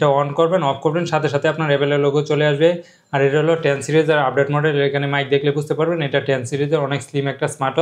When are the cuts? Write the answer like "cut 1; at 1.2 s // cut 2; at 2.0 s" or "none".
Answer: none

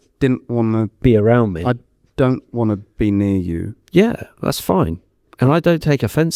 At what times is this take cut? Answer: none

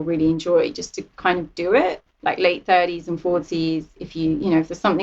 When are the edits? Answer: cut 1; at 2.0 s

